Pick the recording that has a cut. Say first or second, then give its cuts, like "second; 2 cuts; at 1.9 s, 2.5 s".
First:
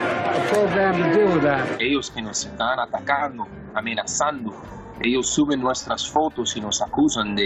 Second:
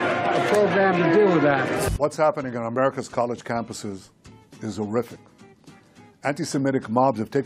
first; 1 cut; at 1.7 s